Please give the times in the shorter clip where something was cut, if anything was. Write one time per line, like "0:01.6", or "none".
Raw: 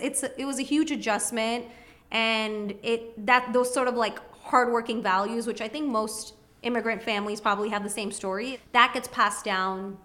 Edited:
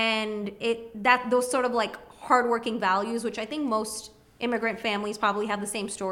none